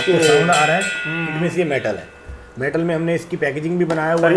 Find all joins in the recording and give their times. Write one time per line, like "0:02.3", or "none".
none